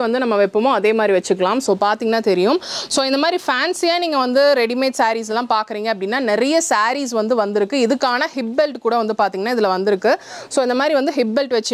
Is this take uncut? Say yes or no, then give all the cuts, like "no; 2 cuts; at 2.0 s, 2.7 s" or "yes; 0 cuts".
yes; 0 cuts